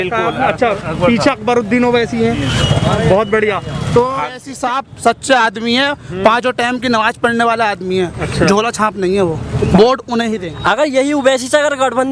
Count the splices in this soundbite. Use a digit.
2